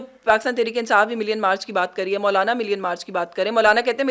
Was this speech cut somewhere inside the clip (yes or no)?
no